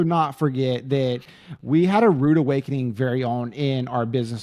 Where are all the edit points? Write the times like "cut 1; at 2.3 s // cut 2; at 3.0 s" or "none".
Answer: none

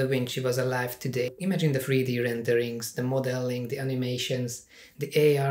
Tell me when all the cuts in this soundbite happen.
cut 1; at 1.3 s

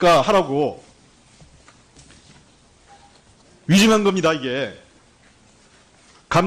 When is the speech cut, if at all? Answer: cut 1; at 1.1 s

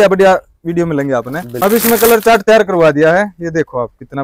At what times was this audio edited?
cut 1; at 1.5 s

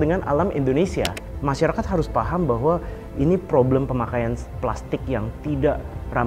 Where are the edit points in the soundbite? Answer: cut 1; at 1.2 s

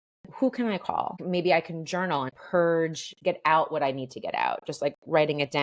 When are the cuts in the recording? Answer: cut 1; at 1.2 s // cut 2; at 2.3 s

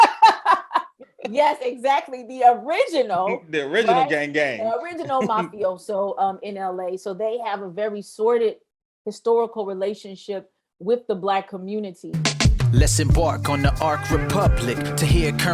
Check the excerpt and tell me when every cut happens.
cut 1; at 12.0 s

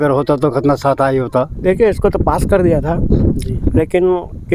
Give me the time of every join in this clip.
cut 1; at 1.6 s

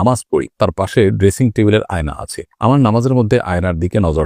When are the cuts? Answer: none

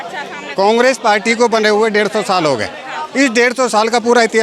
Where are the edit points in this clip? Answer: none

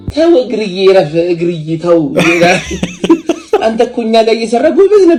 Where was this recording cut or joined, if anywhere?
none

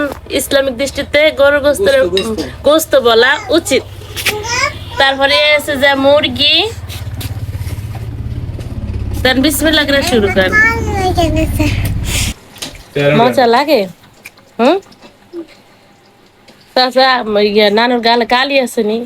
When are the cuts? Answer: cut 1; at 13.2 s

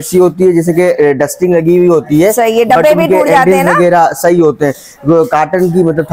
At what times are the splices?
none

